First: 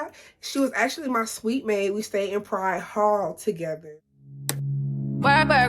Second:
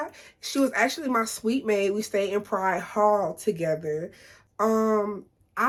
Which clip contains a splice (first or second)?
first